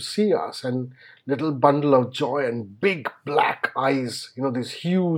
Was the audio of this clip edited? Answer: no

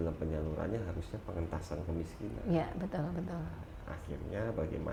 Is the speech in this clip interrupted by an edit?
no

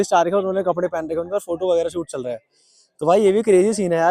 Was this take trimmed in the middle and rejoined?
no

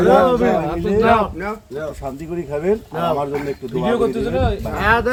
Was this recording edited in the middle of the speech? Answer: no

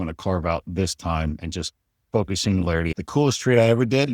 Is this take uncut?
no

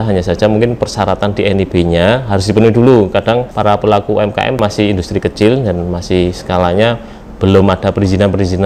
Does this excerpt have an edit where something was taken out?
yes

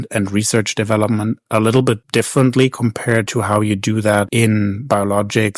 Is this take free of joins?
no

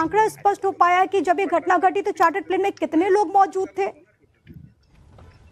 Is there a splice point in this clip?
yes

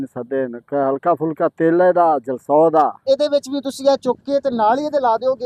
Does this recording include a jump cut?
yes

